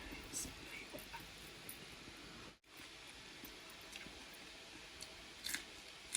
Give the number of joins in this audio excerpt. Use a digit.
1